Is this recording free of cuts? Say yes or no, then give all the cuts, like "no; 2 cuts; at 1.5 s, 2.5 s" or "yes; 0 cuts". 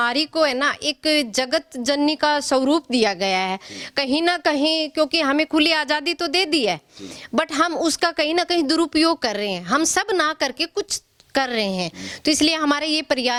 yes; 0 cuts